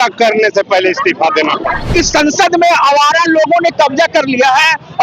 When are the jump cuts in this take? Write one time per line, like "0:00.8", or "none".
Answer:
0:01.9